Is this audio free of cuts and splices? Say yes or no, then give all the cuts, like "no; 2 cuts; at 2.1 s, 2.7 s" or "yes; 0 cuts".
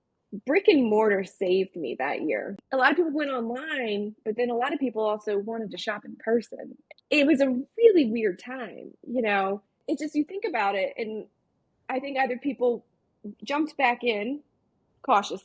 no; 1 cut; at 2.6 s